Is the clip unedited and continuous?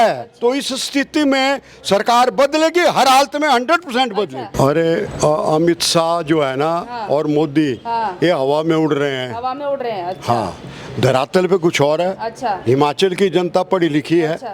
no; 1 cut; at 4.4 s

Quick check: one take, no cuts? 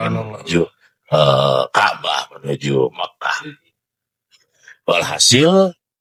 yes; 0 cuts

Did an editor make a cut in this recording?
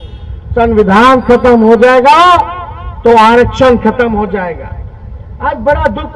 no; 0 cuts

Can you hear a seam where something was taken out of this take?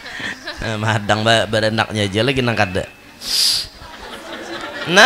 yes; 1 cut; at 4.1 s

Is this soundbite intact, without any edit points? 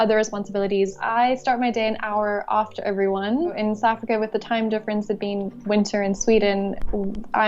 no; 2 cuts; at 1.0 s, 3.6 s

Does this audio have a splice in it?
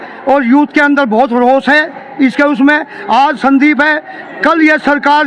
no; 0 cuts

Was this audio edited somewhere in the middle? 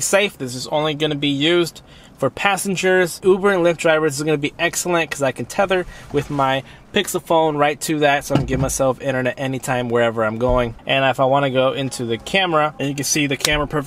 yes; 2 cuts; at 3.1 s, 10.7 s

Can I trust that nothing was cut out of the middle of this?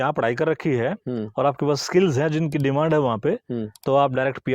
yes; 0 cuts

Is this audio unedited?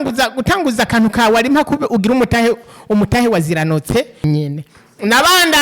no; 1 cut; at 4.2 s

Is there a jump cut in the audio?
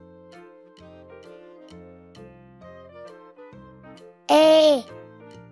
no; 0 cuts

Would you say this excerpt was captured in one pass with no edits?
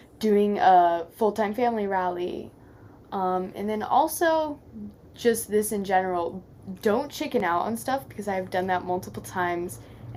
yes; 0 cuts

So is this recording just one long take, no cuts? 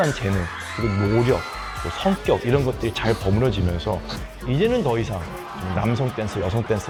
yes; 0 cuts

